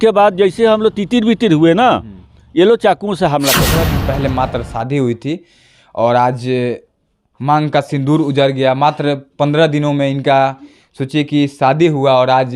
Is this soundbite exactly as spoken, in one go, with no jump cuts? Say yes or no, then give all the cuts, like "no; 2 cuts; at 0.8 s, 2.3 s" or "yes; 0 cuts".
no; 1 cut; at 3.8 s